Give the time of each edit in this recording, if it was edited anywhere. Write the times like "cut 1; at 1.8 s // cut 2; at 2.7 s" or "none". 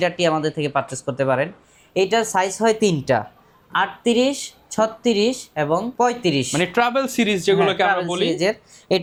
none